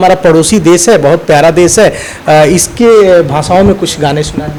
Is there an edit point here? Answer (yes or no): no